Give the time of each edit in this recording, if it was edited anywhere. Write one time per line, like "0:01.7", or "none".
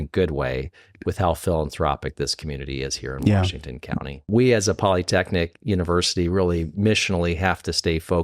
0:04.3